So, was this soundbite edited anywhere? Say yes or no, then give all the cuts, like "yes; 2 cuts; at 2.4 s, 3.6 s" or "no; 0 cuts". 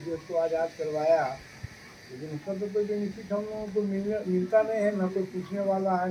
no; 0 cuts